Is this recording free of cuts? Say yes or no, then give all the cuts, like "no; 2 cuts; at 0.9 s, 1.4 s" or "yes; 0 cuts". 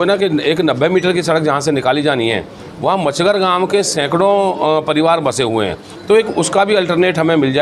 yes; 0 cuts